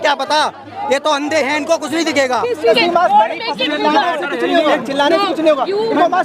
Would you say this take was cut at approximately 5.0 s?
no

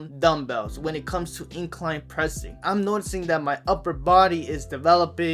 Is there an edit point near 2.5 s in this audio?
yes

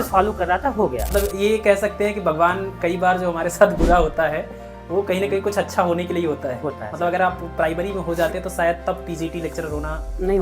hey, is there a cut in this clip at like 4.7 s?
no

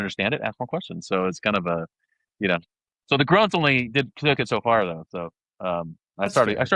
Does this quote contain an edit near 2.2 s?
no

